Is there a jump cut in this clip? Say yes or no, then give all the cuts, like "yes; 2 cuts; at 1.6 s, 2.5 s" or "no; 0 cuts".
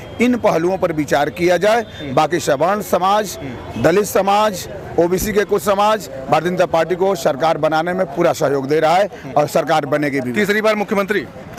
no; 0 cuts